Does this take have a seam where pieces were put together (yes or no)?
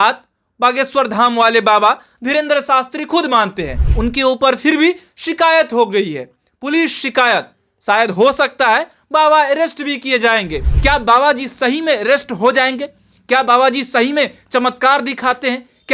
yes